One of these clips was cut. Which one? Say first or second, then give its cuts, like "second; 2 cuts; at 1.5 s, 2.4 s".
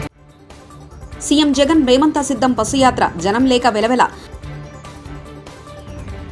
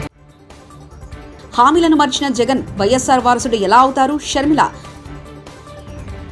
first; 1 cut; at 1.0 s